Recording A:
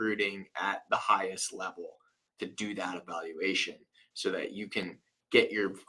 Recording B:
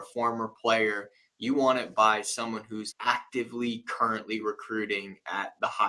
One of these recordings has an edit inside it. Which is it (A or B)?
B